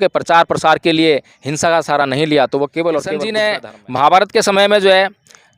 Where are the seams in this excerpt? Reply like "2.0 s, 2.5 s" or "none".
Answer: 3.3 s